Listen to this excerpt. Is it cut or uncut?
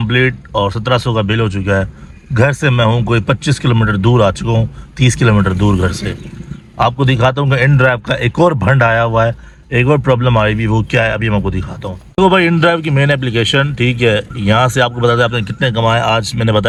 uncut